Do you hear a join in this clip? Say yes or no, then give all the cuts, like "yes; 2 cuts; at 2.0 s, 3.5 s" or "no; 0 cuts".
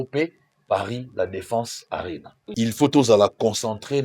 yes; 1 cut; at 2.4 s